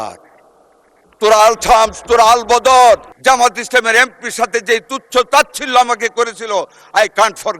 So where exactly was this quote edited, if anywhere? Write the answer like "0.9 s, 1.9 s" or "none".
3.1 s